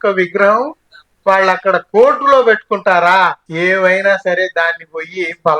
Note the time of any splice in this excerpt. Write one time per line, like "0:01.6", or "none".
0:03.4